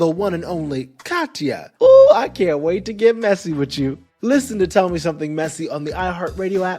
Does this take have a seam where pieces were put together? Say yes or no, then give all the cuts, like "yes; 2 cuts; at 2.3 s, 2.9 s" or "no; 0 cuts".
yes; 1 cut; at 1.7 s